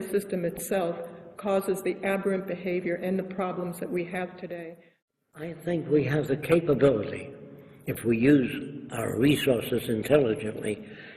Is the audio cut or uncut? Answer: cut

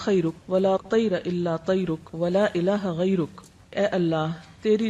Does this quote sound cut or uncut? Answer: cut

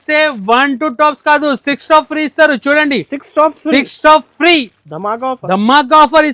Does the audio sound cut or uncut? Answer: uncut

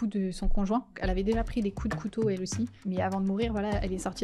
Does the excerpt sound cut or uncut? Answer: cut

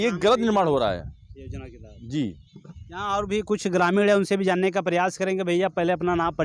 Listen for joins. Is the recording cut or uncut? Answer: uncut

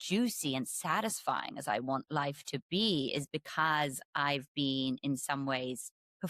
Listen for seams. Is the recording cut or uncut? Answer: uncut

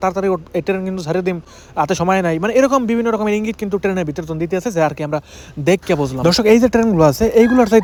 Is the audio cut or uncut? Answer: uncut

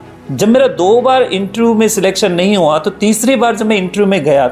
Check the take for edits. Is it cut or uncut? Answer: uncut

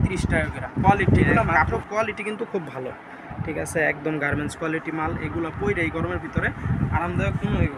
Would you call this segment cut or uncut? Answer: cut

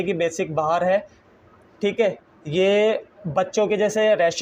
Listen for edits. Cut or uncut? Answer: uncut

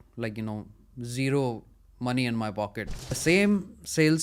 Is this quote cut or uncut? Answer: cut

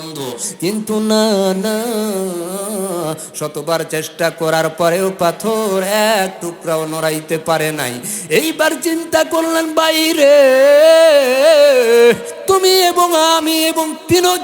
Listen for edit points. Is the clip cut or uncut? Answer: cut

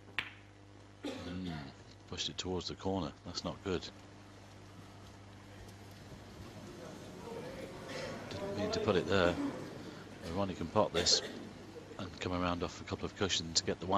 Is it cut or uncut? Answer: uncut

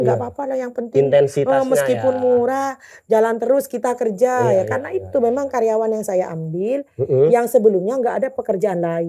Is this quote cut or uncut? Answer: uncut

